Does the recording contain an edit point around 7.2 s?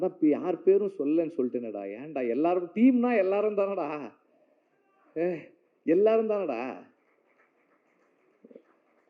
no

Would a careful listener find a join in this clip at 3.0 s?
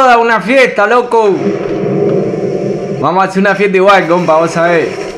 yes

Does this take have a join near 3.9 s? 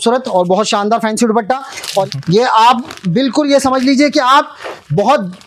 no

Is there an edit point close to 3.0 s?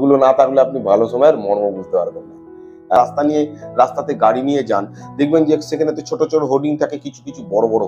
yes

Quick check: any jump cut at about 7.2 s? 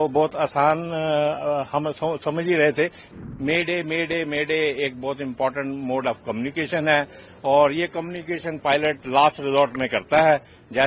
no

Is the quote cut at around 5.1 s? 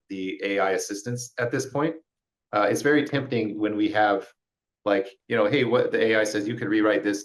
yes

